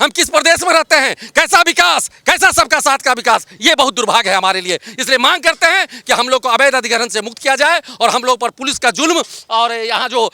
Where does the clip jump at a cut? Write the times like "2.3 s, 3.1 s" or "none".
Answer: none